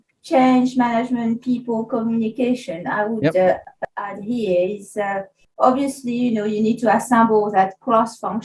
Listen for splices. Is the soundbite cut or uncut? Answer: uncut